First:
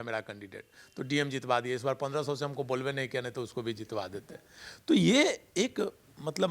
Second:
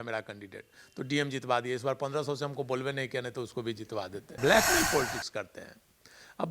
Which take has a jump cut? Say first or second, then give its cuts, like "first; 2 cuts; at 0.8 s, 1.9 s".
second; 1 cut; at 4.3 s